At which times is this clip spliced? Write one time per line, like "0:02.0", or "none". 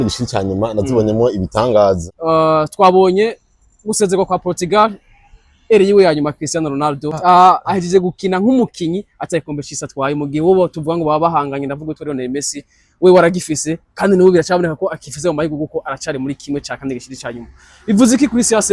0:02.1
0:07.2